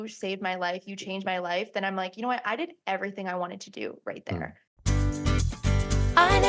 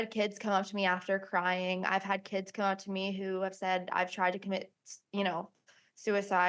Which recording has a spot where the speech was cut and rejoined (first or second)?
first